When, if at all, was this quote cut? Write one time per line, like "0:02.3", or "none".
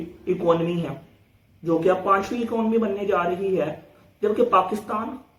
none

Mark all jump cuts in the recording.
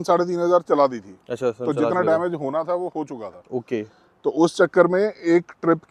none

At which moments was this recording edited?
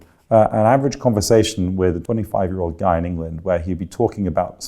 0:02.0

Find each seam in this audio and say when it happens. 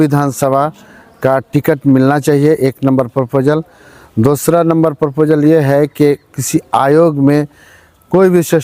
none

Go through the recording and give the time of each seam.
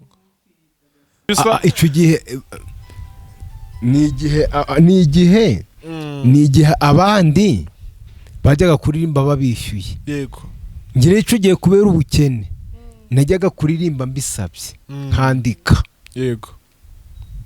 0:01.3

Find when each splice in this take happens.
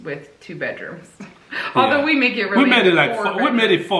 none

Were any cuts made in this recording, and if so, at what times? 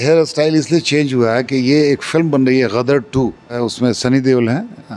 0:03.6

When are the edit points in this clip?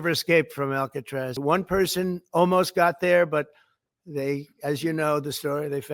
0:01.3

